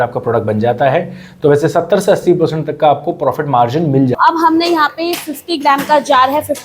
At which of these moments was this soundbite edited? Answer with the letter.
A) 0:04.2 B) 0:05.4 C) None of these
A